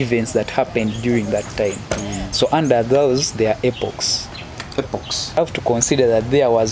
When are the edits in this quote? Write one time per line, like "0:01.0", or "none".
0:05.4